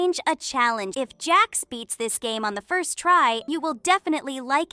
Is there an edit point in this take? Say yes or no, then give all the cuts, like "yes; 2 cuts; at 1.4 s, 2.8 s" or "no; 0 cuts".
yes; 2 cuts; at 0.9 s, 3.5 s